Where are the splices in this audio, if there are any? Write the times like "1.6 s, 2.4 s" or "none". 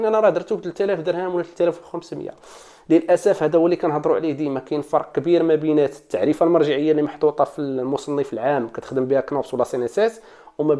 none